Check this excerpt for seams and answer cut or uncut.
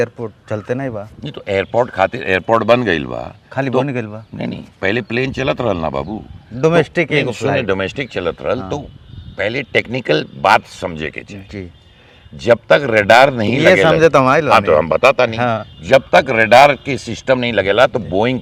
uncut